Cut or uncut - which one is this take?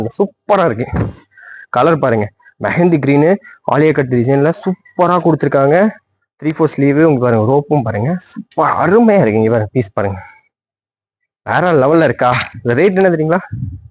uncut